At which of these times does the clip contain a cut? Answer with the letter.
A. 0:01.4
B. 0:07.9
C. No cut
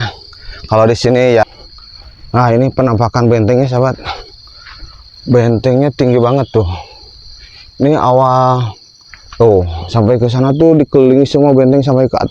A